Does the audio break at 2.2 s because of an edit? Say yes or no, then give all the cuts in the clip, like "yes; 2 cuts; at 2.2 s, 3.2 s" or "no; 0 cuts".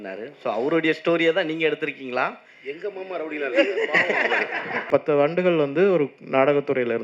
no; 1 cut; at 4.9 s